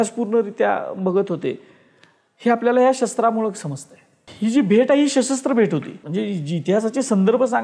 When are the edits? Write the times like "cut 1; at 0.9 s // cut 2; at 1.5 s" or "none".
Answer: cut 1; at 4.3 s // cut 2; at 6.0 s